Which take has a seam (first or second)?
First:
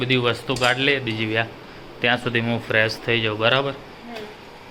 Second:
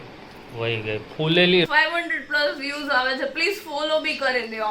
second